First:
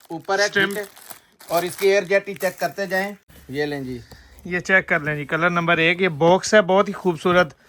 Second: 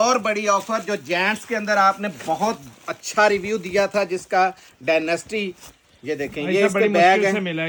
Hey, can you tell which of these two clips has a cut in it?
first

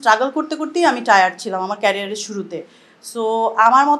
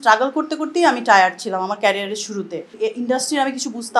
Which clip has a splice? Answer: second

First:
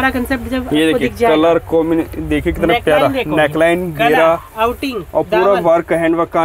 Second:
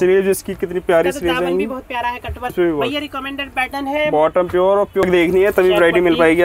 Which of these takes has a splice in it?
second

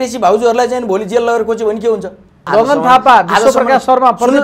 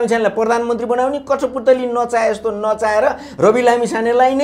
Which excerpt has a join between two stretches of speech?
first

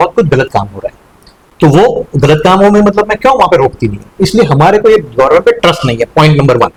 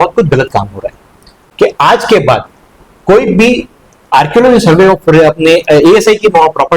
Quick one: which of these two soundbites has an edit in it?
second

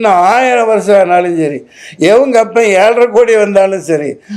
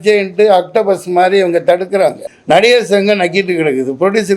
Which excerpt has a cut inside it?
second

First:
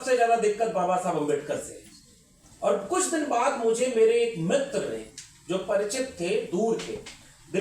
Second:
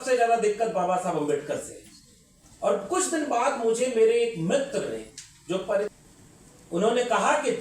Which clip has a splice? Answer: second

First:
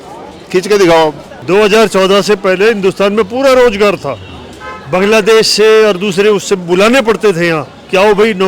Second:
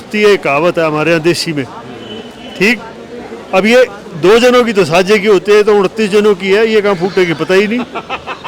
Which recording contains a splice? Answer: first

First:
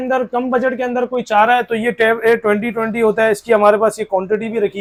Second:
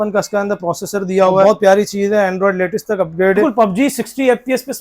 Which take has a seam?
second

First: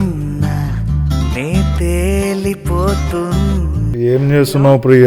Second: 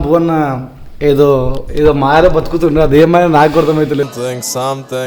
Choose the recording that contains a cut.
first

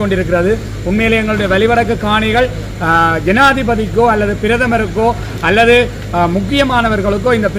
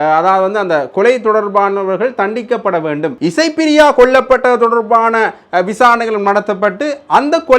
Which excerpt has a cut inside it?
second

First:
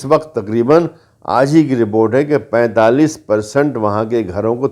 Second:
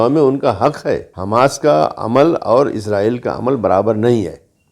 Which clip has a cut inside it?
second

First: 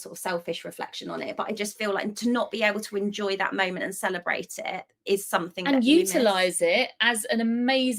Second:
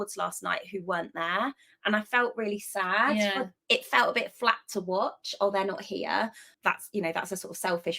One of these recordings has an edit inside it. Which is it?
second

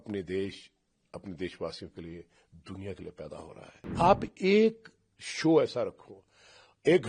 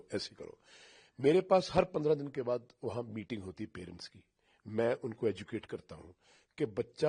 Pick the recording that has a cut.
first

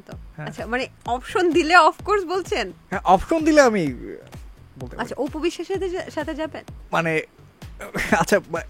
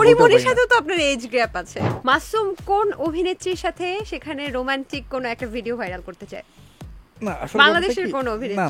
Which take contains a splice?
second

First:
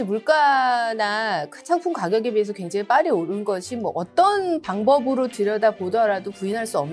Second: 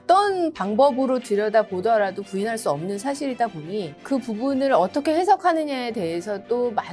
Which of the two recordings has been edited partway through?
second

